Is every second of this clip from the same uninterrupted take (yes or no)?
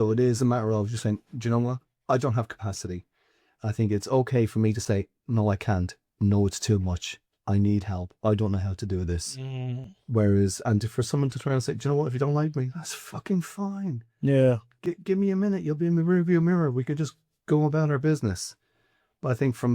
yes